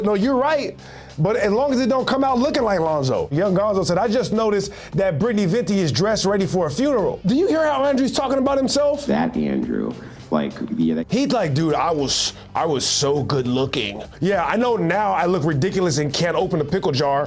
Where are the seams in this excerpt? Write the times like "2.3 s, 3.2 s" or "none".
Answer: 3.3 s, 7.2 s, 14.1 s